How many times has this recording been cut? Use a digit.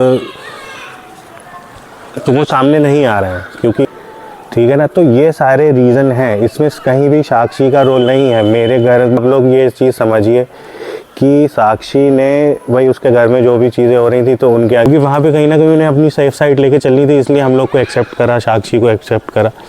3